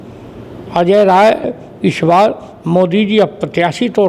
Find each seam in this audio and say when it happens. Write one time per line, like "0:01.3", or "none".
0:01.6